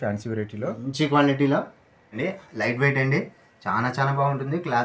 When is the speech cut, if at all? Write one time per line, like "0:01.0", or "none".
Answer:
0:02.2